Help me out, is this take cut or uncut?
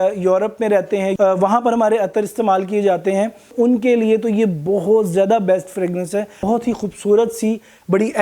cut